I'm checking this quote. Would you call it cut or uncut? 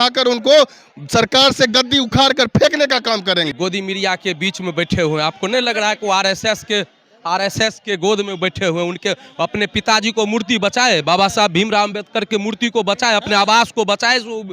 cut